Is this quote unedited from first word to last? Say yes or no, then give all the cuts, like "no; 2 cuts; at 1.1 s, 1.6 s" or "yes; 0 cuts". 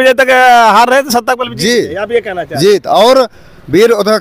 yes; 0 cuts